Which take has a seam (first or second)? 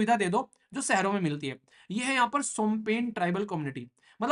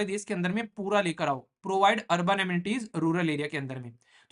first